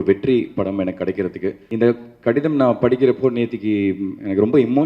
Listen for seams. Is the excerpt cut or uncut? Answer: cut